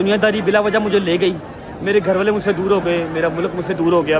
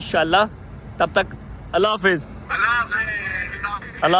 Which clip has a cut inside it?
second; 1 cut; at 2.4 s

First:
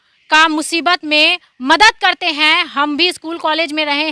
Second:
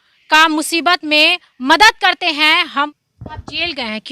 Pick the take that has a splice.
second; 1 cut; at 2.9 s

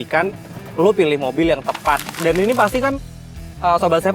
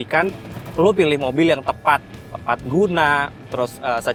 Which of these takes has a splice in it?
first; 1 cut; at 2.1 s

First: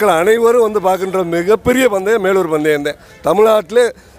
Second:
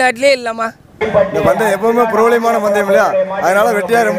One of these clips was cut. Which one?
second; 1 cut; at 1.0 s

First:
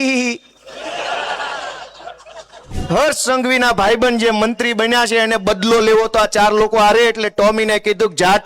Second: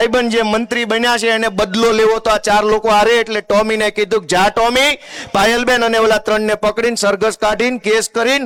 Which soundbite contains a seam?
first; 1 cut; at 2.8 s

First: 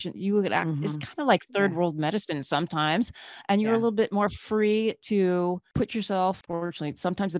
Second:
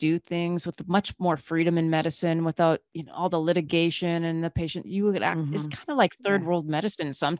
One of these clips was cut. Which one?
first; 2 cuts; at 5.7 s, 6.4 s

